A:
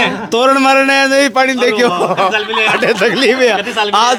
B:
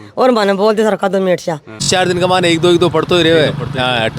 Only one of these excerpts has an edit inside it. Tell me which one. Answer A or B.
B